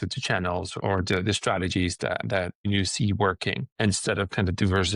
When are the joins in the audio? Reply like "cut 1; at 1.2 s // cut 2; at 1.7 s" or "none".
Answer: cut 1; at 0.8 s // cut 2; at 2.7 s // cut 3; at 3.7 s